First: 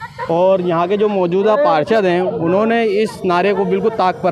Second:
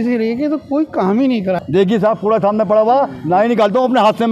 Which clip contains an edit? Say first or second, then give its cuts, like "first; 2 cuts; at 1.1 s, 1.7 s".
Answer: second; 1 cut; at 1.6 s